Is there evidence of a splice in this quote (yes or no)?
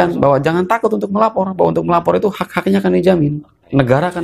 no